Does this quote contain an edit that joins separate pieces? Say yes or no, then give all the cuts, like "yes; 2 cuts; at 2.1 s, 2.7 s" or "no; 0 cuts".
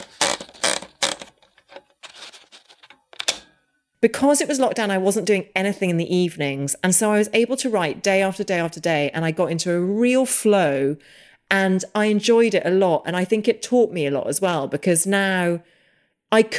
yes; 1 cut; at 3.8 s